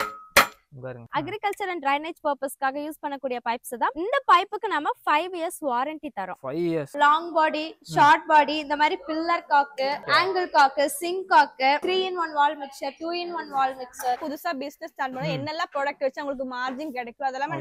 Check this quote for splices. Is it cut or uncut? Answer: cut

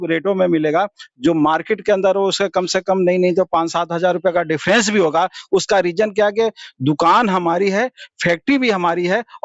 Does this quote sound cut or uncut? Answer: uncut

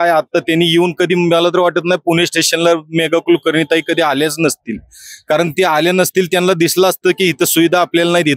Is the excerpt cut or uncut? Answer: uncut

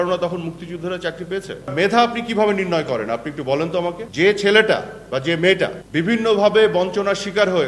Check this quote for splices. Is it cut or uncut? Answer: cut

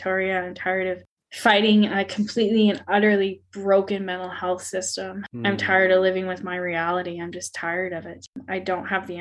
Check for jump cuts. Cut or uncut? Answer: cut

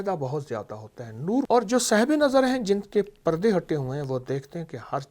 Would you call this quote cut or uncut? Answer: cut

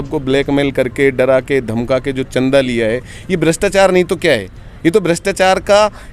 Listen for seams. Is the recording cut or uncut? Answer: uncut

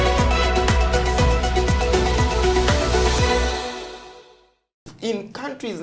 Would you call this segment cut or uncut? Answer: cut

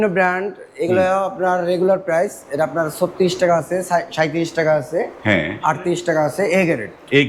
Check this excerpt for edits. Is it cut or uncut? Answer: uncut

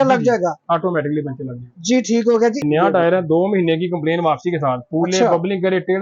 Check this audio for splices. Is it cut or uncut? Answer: cut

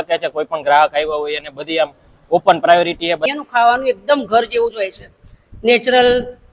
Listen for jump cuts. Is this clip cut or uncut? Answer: cut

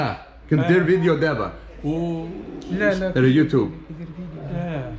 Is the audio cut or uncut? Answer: uncut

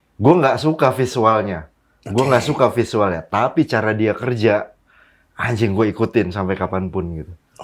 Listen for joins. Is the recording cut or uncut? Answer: uncut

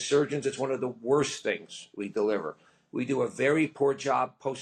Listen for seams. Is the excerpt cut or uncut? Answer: uncut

